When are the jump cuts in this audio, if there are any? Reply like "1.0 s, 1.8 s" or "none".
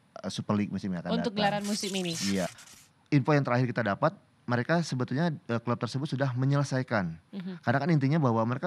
2.5 s

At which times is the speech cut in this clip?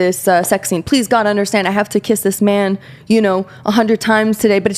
none

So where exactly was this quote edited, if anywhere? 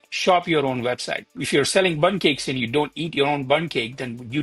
1.4 s

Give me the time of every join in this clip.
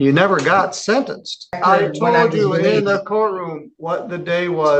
1.6 s

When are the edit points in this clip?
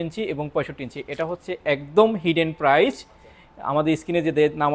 none

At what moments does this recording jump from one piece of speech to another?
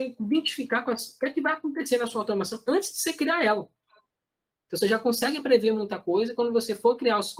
none

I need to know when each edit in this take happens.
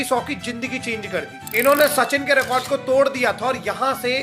1.4 s

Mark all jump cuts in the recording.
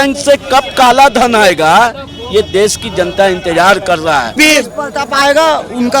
4.4 s

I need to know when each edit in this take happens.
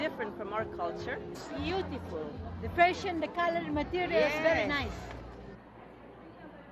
4.6 s

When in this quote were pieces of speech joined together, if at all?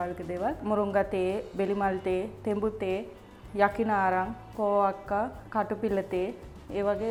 none

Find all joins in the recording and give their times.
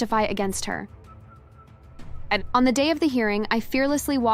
none

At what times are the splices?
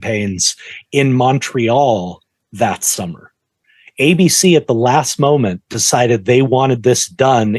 none

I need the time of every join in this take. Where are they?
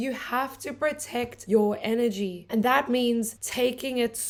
none

